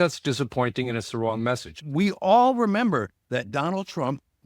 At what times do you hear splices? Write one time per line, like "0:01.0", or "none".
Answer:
0:01.7